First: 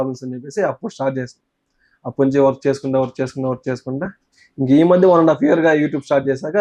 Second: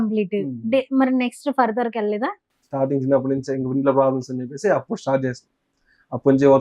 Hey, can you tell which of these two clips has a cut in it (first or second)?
second